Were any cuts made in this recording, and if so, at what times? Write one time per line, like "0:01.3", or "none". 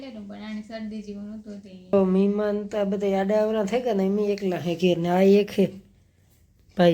0:01.9